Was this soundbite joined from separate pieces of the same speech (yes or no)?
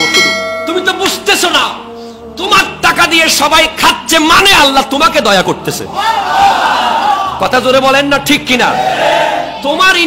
no